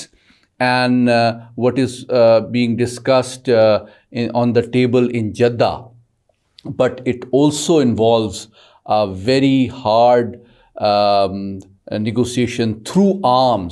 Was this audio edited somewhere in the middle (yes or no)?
no